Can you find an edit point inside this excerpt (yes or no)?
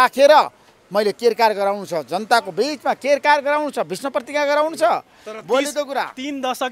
no